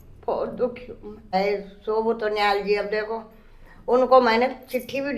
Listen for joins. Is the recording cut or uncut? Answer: cut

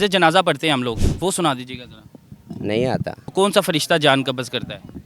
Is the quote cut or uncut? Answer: cut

